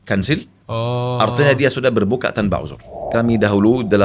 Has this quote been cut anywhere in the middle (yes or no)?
yes